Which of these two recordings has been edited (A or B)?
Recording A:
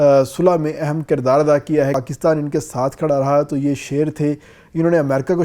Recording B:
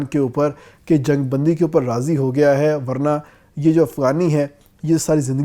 A